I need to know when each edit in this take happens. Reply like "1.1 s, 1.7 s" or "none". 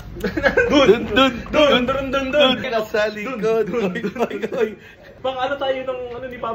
2.7 s, 5.2 s